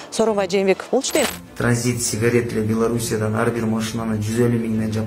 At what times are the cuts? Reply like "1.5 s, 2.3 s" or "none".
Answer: 1.3 s